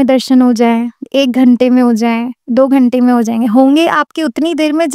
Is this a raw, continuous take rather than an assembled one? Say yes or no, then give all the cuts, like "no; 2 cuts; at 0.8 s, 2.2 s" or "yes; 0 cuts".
yes; 0 cuts